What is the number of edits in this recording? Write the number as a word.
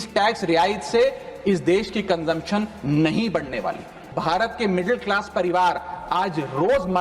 one